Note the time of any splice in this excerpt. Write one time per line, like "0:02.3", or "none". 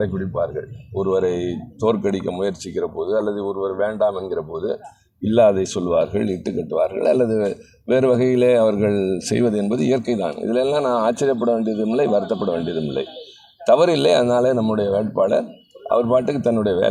none